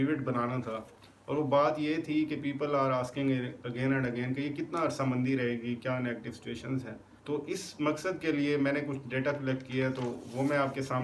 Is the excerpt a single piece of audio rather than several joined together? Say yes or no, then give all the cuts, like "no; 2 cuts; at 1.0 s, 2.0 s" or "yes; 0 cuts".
no; 1 cut; at 7.0 s